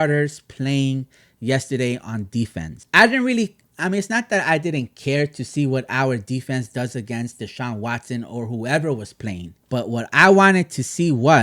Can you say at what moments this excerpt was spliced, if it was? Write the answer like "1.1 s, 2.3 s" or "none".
2.8 s, 9.5 s